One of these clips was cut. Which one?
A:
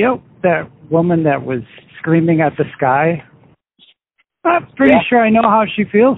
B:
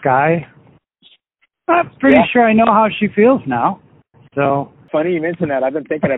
B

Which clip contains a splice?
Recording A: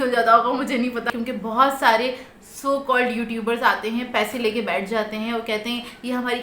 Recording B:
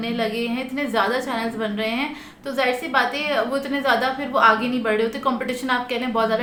A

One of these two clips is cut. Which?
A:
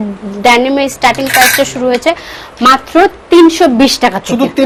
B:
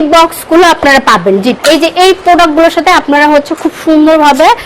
B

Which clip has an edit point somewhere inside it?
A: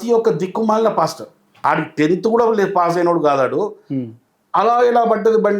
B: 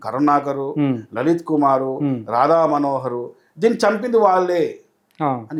A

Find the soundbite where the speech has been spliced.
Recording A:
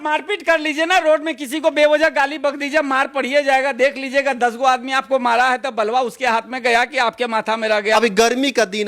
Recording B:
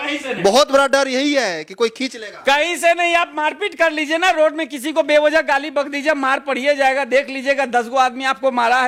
A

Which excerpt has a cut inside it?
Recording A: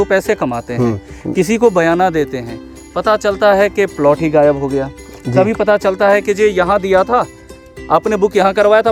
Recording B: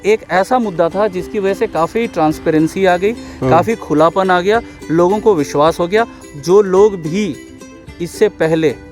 B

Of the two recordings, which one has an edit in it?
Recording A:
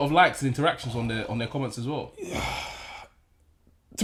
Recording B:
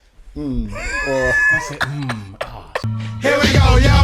B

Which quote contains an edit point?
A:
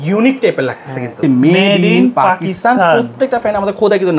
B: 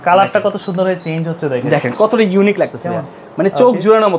A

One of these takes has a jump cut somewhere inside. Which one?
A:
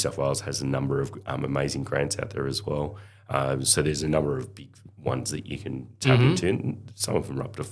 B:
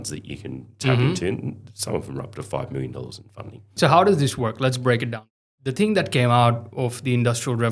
B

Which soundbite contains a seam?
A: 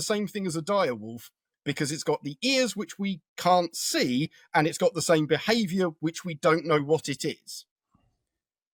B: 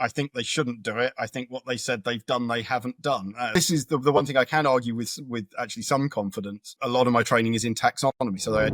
B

